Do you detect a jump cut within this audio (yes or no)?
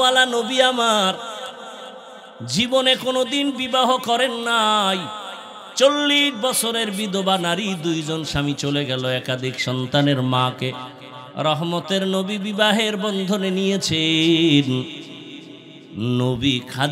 no